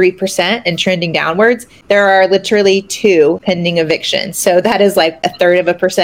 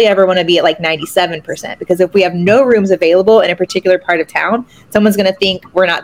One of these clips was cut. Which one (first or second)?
first